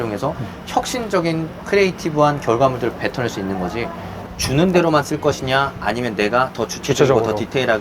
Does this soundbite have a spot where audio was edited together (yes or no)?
yes